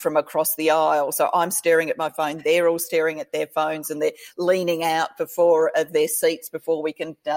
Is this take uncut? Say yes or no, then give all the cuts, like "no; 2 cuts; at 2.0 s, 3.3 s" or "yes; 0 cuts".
yes; 0 cuts